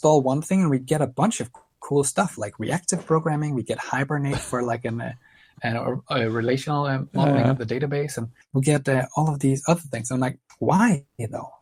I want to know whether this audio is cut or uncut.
uncut